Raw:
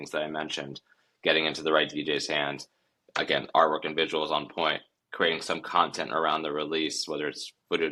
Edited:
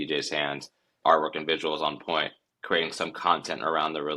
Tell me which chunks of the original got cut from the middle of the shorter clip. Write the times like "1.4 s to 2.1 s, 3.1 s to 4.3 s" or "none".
2.9 s to 3.5 s